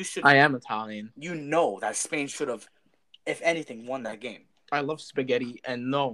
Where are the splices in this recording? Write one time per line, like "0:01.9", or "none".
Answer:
none